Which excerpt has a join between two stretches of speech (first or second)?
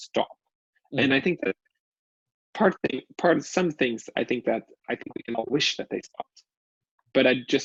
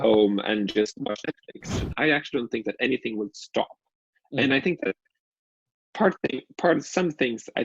second